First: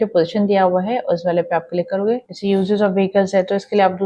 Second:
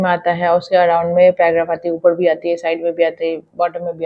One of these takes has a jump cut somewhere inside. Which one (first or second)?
first